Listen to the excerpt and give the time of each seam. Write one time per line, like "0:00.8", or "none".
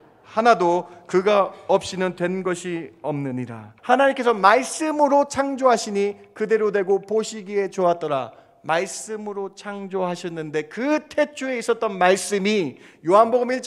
0:03.7